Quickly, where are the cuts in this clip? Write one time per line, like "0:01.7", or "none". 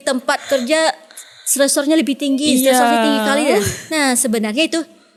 none

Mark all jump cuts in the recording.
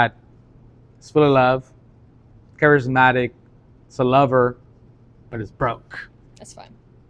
none

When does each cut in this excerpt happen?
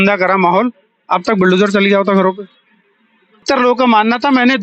0:03.4

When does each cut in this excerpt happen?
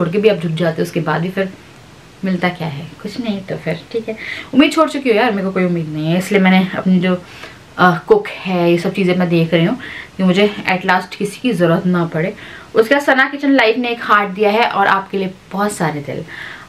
none

